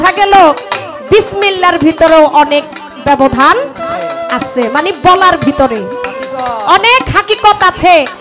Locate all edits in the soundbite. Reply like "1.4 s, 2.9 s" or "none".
none